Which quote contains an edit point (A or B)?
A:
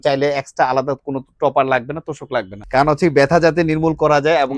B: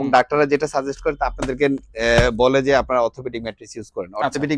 A